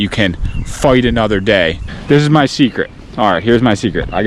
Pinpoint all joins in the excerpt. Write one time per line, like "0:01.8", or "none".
0:01.9